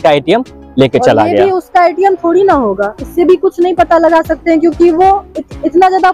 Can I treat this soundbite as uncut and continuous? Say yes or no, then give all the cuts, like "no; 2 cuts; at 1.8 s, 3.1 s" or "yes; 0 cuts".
yes; 0 cuts